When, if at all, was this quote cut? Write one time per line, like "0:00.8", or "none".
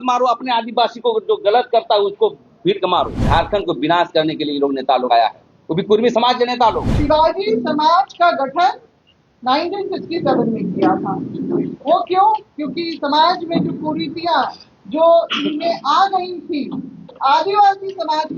0:03.2
0:06.9